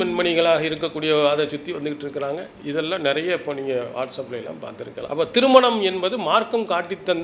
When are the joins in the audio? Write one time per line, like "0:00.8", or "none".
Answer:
0:05.1